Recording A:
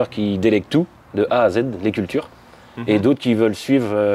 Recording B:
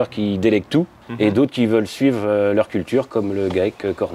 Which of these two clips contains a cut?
B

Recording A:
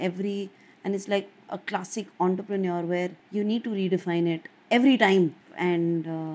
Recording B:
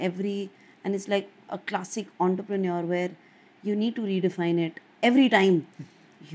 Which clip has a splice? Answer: A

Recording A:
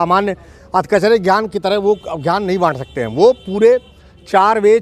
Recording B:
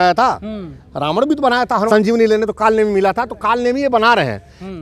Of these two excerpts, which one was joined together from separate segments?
B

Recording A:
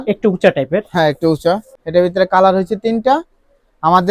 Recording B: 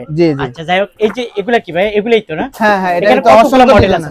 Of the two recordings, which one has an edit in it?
A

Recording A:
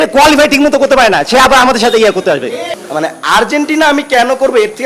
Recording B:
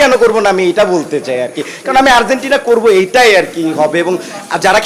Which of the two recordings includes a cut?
A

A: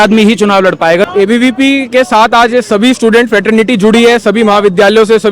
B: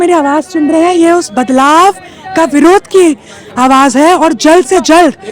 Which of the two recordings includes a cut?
A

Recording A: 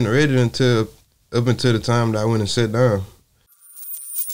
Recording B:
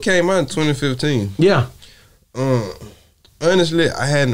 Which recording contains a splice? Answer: A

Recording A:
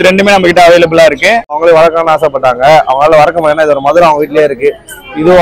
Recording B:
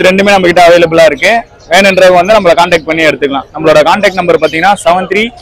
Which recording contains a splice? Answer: A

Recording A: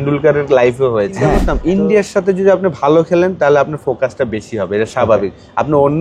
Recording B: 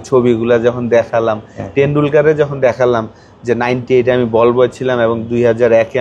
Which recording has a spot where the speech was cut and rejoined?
A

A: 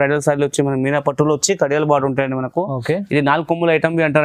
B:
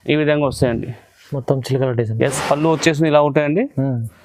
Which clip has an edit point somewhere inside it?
B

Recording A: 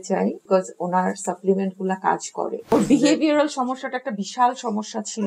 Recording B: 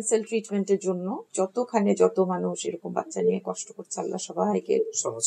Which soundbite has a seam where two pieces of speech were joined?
A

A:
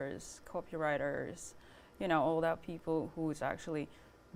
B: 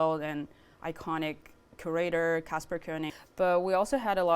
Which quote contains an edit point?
B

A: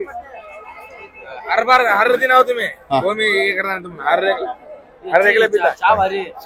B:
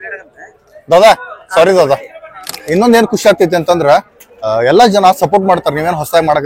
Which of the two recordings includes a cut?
B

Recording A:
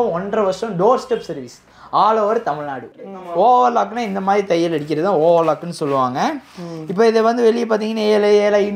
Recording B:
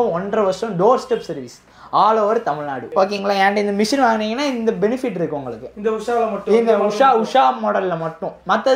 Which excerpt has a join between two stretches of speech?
A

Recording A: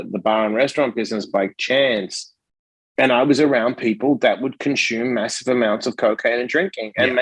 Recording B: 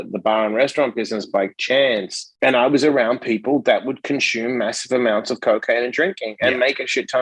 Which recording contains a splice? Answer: B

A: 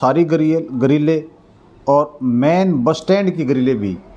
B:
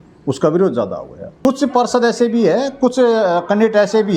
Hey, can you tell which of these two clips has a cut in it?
B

